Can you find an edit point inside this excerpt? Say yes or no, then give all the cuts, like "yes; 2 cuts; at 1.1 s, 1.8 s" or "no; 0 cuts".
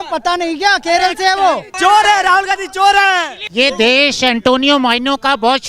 yes; 2 cuts; at 1.7 s, 3.4 s